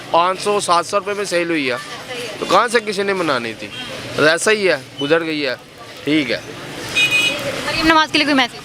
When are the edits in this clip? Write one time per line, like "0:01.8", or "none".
none